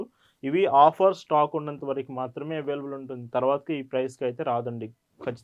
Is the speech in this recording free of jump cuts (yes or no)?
yes